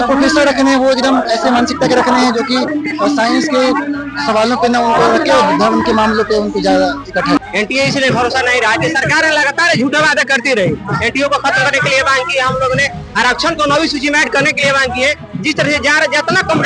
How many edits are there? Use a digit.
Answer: 1